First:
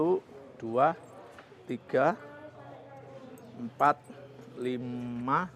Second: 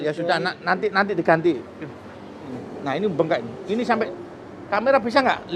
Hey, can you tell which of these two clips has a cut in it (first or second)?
second